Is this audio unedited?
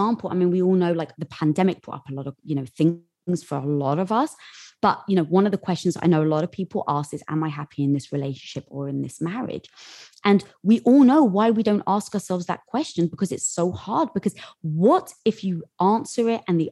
yes; 0 cuts

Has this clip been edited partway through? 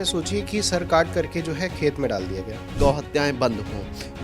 yes; 1 cut; at 2.7 s

